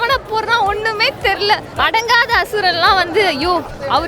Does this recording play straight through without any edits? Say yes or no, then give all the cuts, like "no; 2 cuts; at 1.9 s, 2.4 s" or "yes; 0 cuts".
no; 1 cut; at 1.7 s